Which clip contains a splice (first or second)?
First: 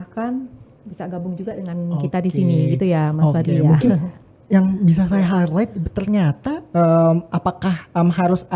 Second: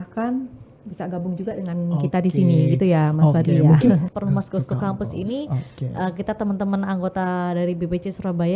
second